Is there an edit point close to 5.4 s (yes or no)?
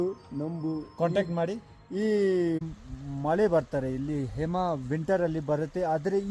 no